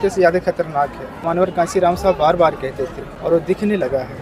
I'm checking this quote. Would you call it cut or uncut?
cut